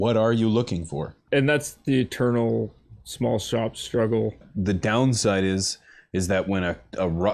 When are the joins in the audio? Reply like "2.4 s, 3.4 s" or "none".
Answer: 1.2 s, 4.5 s